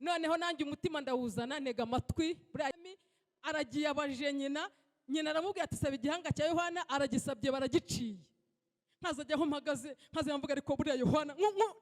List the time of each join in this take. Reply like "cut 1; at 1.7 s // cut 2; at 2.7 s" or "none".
cut 1; at 2.7 s